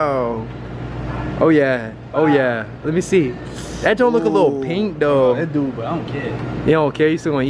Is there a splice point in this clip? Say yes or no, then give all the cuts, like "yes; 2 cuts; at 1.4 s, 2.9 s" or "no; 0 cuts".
no; 0 cuts